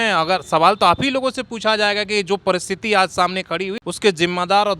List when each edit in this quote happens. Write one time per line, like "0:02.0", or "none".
0:03.8